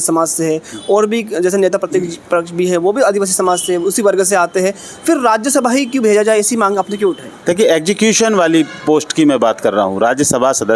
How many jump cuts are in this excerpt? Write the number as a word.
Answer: zero